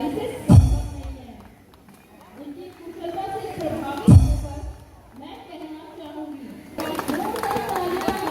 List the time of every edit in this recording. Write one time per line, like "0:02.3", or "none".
0:06.8